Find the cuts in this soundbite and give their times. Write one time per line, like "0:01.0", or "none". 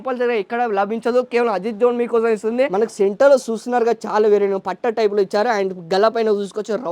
0:02.7